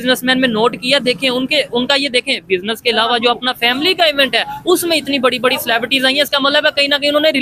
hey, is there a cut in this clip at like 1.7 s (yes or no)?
no